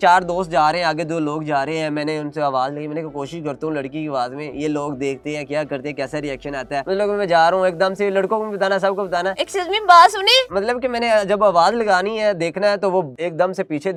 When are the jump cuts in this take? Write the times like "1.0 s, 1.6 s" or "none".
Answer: none